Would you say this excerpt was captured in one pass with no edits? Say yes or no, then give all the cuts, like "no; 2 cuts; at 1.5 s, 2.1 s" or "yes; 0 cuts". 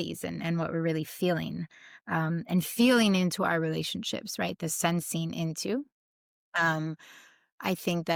yes; 0 cuts